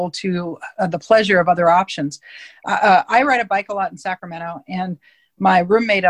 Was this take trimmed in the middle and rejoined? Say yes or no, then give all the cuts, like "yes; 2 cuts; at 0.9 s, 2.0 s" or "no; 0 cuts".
no; 0 cuts